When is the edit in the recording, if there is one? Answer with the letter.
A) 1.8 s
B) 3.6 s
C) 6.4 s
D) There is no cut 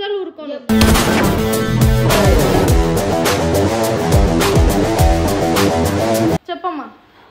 C